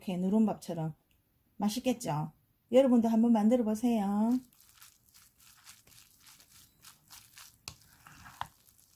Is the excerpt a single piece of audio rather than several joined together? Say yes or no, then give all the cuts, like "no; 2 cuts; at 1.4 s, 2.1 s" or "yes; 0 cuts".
yes; 0 cuts